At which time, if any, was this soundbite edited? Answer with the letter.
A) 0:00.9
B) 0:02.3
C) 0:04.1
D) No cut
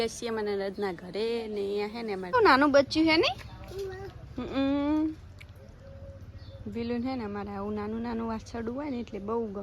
B